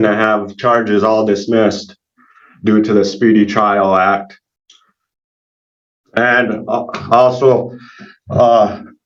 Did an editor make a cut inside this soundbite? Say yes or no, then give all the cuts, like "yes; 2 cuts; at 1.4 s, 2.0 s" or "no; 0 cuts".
no; 0 cuts